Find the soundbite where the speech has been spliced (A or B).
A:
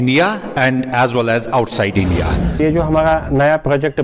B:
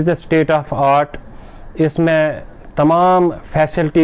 A